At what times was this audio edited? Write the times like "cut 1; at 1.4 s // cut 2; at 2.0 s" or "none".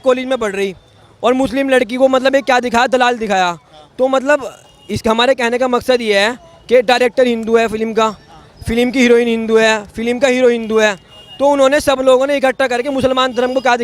cut 1; at 6.5 s